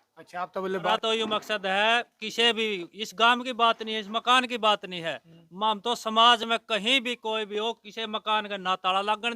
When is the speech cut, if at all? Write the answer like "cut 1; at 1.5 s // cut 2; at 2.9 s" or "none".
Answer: cut 1; at 0.9 s